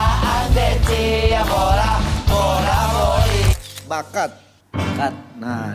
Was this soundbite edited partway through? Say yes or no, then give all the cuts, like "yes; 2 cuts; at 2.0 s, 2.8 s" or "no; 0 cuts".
yes; 1 cut; at 3.5 s